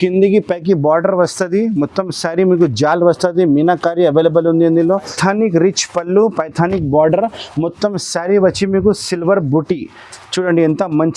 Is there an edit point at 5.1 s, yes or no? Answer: yes